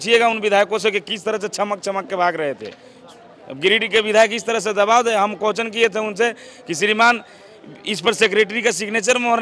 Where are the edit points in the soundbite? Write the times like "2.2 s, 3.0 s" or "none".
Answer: none